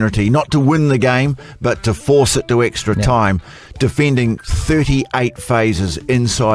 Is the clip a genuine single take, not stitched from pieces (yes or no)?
yes